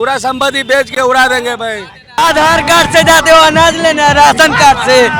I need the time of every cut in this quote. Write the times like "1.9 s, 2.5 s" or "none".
0.9 s, 2.2 s